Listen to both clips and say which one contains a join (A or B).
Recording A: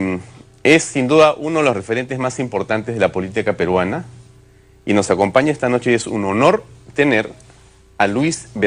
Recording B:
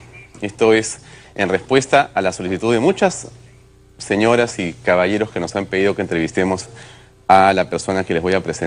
A